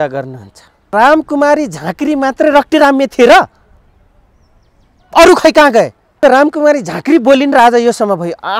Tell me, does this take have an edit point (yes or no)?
yes